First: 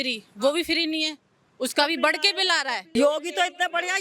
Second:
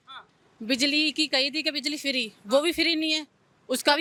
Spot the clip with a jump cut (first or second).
first